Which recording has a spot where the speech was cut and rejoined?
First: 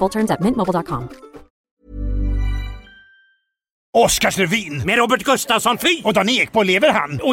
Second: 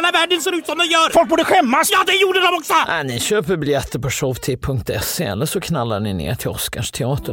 first; 2 cuts; at 1.8 s, 3.8 s

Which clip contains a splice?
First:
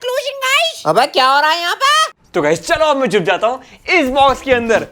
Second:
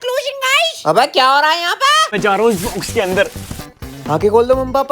second; 1 cut; at 2.1 s

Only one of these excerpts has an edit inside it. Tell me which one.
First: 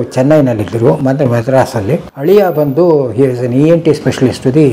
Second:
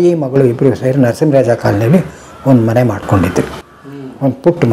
first; 1 cut; at 2.1 s

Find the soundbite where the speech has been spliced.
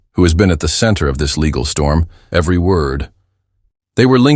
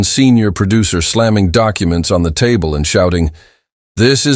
first; 1 cut; at 2.2 s

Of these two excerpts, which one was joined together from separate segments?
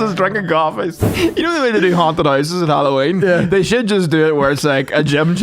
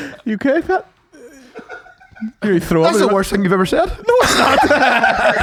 first; 1 cut; at 1.0 s

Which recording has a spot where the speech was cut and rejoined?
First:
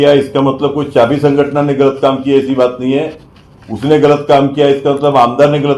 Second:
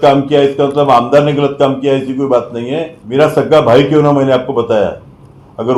second; 1 cut; at 3.0 s

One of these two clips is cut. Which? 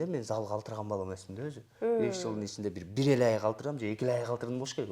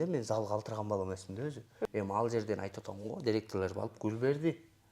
second; 1 cut; at 1.9 s

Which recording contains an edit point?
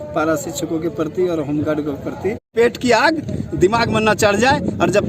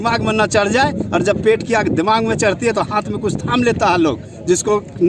first; 1 cut; at 2.4 s

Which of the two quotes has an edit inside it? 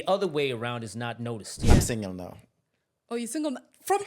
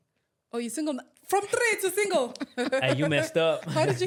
first; 1 cut; at 1.5 s

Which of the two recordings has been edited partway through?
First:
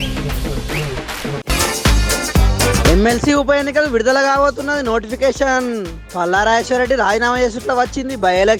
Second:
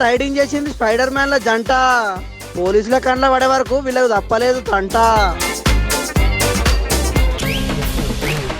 second; 1 cut; at 7.3 s

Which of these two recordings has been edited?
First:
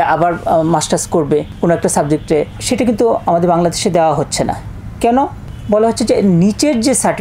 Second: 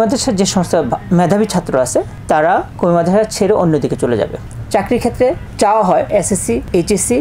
second; 2 cuts; at 4.4 s, 6.2 s

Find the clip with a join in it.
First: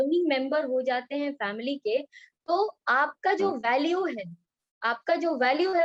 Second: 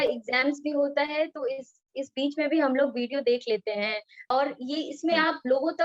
second; 1 cut; at 4.1 s

